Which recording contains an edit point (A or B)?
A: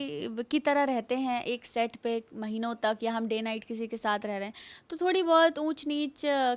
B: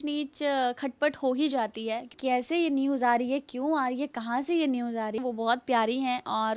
B